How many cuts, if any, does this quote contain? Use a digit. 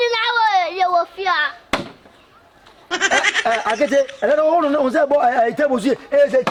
0